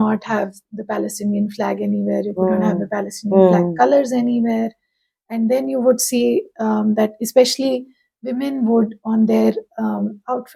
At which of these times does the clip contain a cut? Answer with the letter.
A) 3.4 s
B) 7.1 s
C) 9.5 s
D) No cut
D